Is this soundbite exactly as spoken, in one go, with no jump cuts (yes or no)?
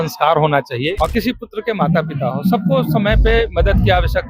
no